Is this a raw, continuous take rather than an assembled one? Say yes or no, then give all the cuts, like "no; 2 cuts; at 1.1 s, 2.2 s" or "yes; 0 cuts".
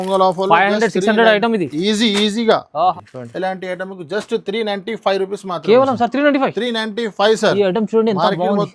no; 1 cut; at 2.9 s